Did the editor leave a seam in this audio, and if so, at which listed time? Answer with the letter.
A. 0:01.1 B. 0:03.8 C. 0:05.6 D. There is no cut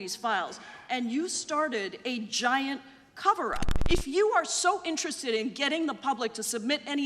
B